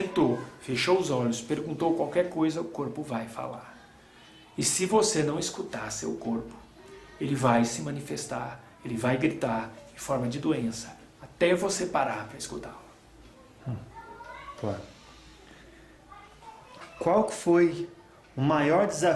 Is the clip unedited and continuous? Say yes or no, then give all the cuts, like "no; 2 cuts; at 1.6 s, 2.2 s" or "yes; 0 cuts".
yes; 0 cuts